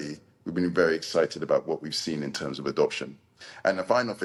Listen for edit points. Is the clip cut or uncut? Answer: uncut